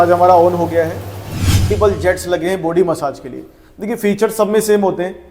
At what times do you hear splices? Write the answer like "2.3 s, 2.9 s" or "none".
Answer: 1.7 s